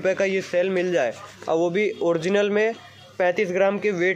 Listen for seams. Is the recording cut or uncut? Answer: uncut